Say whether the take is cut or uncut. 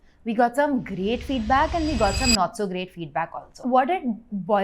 cut